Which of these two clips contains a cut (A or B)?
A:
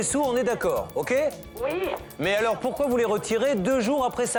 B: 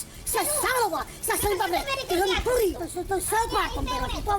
B